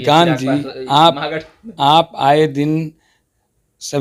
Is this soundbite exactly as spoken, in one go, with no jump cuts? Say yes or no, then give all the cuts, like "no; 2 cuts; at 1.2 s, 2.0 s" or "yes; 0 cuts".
yes; 0 cuts